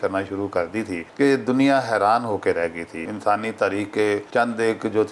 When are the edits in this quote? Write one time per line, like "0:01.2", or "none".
0:01.0
0:03.0
0:04.3